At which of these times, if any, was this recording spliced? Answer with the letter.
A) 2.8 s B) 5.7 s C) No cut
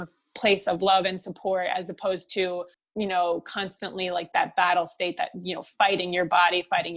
A